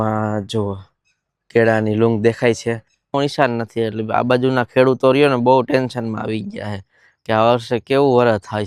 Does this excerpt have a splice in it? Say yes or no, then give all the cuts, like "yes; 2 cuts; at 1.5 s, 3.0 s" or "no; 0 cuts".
yes; 1 cut; at 3.1 s